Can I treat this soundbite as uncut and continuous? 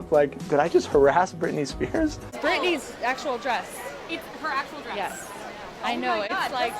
no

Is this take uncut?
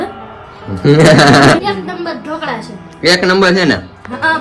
no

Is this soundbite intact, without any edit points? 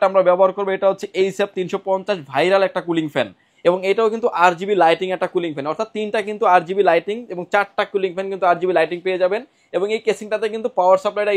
yes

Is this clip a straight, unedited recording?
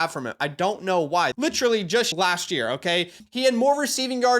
no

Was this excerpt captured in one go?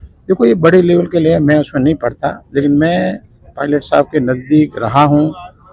yes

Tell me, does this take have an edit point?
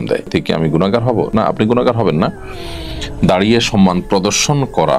no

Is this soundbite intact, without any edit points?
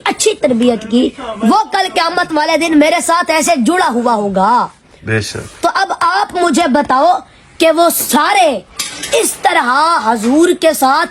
yes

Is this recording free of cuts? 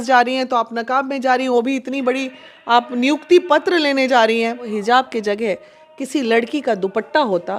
no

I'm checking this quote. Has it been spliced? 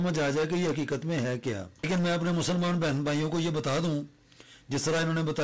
yes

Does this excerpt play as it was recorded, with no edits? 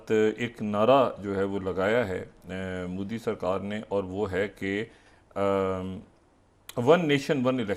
yes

